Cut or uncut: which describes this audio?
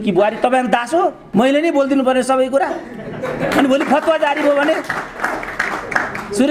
cut